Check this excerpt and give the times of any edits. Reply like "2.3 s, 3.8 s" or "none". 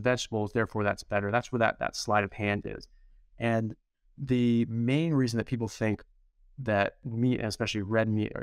none